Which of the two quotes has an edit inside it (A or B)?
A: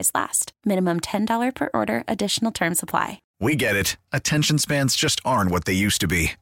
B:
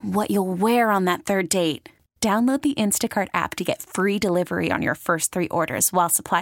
A